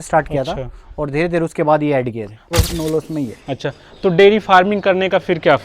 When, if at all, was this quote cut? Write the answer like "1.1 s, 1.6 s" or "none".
2.4 s